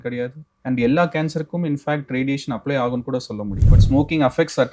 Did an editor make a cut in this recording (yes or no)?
yes